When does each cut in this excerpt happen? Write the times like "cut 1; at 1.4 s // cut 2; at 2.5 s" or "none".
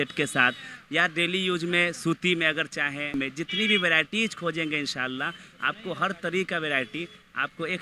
cut 1; at 3.1 s

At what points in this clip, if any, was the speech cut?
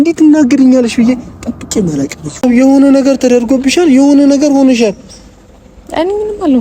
cut 1; at 2.4 s

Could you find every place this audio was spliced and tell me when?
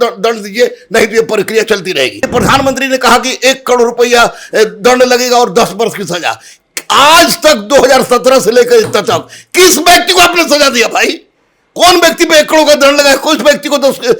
cut 1; at 2.3 s

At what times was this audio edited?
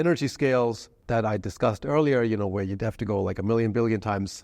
cut 1; at 0.9 s

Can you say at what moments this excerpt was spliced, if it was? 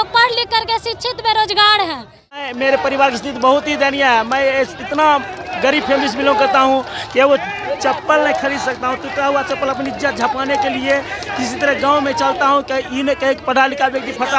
cut 1; at 2.5 s

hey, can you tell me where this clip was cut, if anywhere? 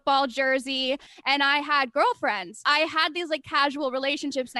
cut 1; at 1.1 s // cut 2; at 2.6 s

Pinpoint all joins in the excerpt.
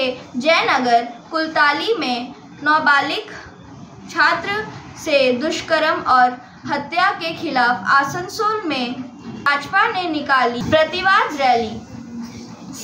none

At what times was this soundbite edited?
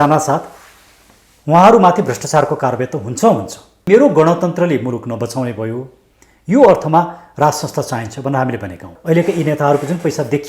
cut 1; at 3.9 s // cut 2; at 8.9 s

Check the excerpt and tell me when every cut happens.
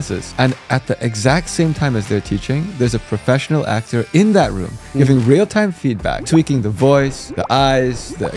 none

